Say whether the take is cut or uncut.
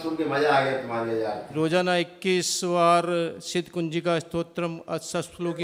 uncut